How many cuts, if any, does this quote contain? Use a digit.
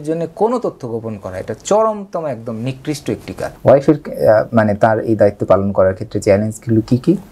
1